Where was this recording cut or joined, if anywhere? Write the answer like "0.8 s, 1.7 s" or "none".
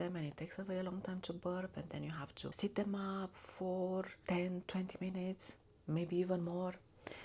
2.5 s, 4.2 s